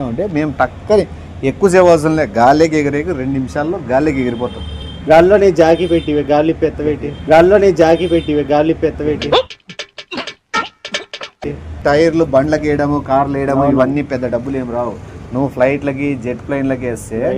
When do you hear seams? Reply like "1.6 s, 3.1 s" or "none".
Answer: 4.9 s, 7.0 s, 9.1 s, 11.8 s